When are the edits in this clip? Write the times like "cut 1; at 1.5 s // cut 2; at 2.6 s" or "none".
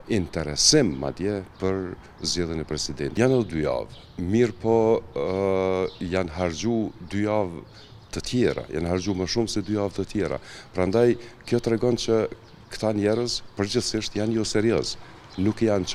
none